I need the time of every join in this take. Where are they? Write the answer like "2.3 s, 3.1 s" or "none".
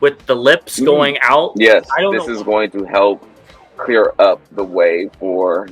2.0 s